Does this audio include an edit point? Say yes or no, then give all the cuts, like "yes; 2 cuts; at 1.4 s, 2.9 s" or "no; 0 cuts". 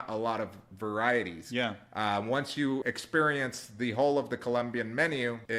no; 0 cuts